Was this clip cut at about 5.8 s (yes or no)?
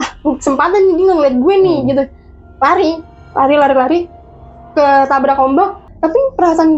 yes